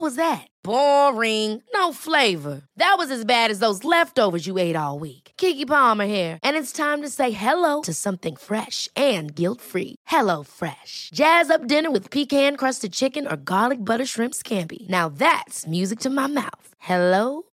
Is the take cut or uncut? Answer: uncut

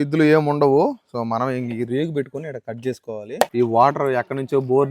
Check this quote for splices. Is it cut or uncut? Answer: cut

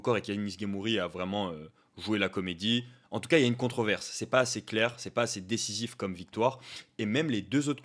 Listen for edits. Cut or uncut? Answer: uncut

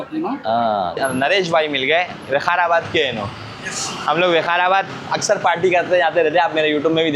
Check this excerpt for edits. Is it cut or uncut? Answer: cut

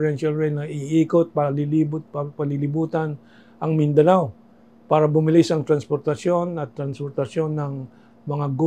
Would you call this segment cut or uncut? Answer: uncut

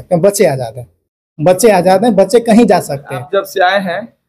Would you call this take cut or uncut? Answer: cut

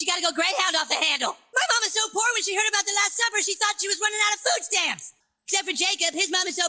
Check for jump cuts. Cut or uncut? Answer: cut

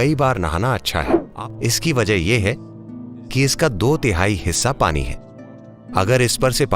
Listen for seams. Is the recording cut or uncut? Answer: cut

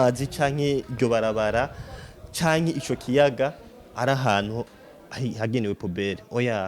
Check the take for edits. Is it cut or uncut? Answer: uncut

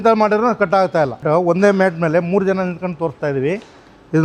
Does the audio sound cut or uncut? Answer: cut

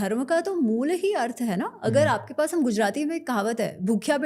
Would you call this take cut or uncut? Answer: uncut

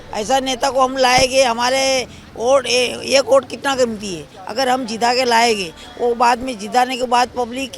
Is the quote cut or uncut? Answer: uncut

